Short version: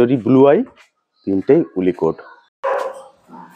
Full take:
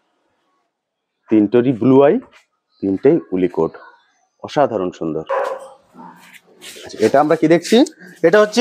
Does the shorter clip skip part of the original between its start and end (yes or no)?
yes